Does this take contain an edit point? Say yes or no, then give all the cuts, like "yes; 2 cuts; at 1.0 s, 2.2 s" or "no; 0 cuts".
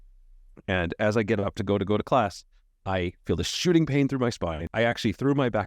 yes; 1 cut; at 4.6 s